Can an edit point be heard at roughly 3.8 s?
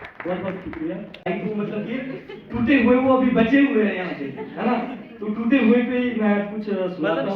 no; 1 cut; at 1.3 s

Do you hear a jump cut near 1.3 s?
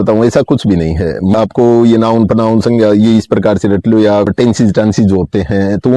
yes; 2 cuts; at 1.3 s, 4.3 s

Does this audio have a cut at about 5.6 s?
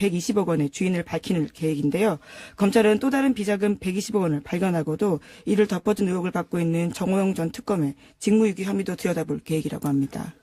yes; 1 cut; at 5.6 s

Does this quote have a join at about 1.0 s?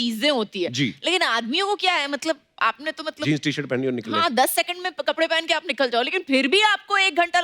no; 0 cuts

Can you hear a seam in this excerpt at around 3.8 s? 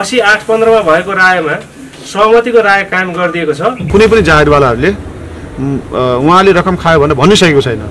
yes; 1 cut; at 3.8 s

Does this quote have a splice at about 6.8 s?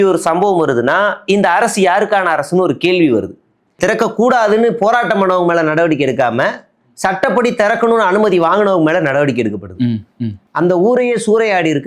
no; 1 cut; at 3.8 s

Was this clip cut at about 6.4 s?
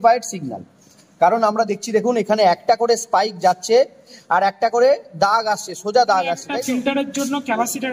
yes; 1 cut; at 6.4 s

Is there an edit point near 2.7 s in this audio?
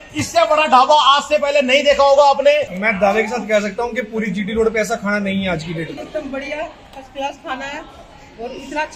yes; 2 cuts; at 2.7 s, 6.0 s

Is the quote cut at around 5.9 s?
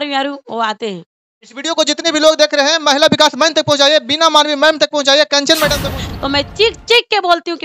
yes; 1 cut; at 5.9 s

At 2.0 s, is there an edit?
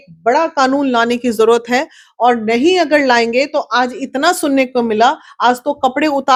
no; 0 cuts

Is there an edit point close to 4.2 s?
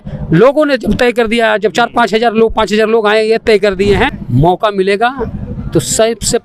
yes; 1 cut; at 4.2 s

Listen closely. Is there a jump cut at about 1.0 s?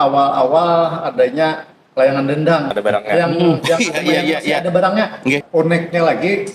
no; 2 cuts; at 2.7 s, 5.4 s

